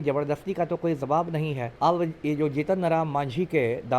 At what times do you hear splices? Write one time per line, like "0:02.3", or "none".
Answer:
0:01.6